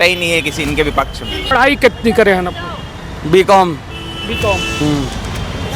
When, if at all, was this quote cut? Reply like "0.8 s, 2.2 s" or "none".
1.5 s